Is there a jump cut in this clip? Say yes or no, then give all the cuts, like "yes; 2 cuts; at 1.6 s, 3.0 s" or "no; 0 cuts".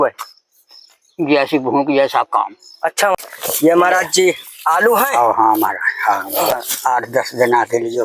yes; 2 cuts; at 3.2 s, 6.5 s